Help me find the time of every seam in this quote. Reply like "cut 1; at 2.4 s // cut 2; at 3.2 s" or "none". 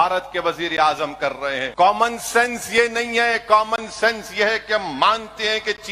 cut 1; at 1.7 s